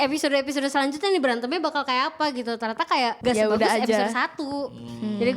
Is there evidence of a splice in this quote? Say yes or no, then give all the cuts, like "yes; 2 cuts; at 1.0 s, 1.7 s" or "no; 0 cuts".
yes; 1 cut; at 3.2 s